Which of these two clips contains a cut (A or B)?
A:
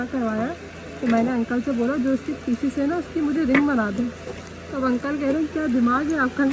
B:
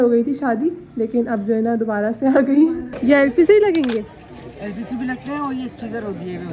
B